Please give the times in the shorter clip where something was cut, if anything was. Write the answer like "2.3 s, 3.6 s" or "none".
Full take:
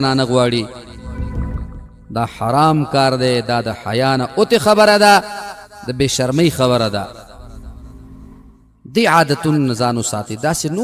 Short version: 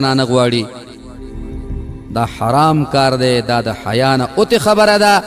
none